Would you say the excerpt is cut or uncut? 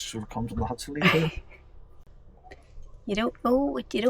cut